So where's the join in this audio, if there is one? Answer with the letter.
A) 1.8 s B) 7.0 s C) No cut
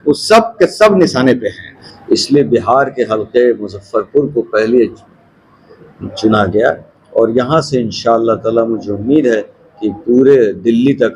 A